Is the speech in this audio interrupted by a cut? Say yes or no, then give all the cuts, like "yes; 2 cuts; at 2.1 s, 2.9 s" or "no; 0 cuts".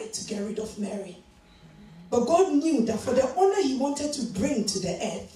no; 0 cuts